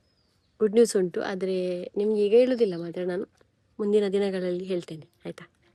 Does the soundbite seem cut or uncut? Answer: uncut